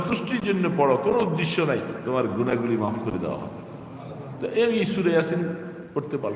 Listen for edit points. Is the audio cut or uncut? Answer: uncut